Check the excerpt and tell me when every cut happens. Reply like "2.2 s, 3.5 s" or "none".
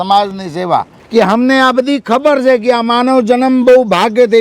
1.0 s

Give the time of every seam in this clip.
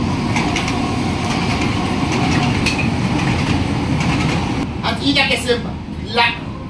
4.6 s

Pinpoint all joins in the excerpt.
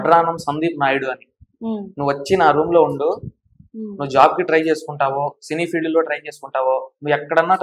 none

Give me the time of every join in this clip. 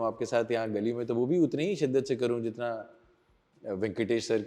none

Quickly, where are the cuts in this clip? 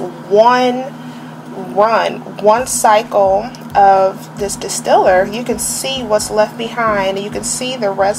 none

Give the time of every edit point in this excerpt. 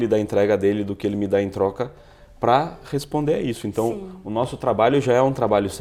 none

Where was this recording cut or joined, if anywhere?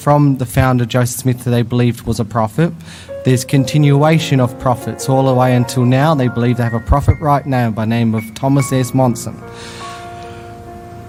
none

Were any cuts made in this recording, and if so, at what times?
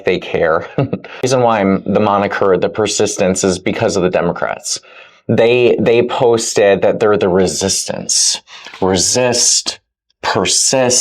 1.2 s

